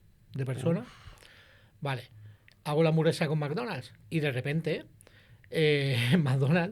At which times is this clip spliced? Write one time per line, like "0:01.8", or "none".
0:03.9